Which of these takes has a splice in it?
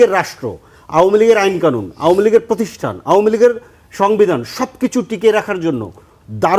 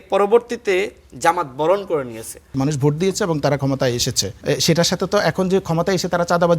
second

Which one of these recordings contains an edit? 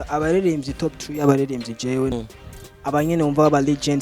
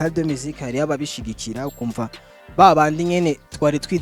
first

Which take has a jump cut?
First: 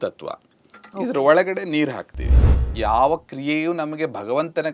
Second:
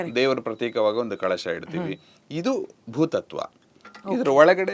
first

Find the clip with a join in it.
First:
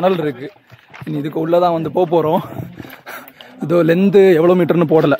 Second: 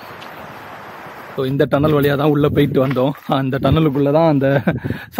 second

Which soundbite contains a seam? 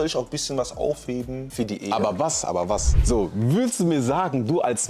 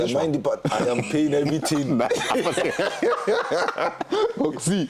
first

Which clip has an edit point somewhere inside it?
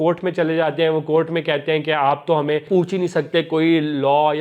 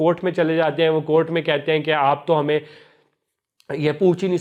first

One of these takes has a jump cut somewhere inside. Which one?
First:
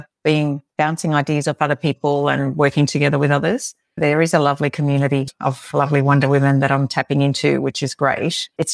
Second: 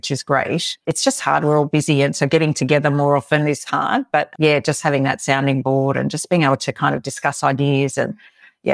first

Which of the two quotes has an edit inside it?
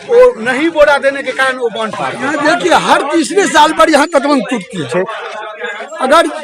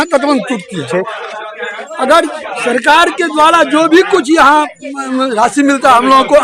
first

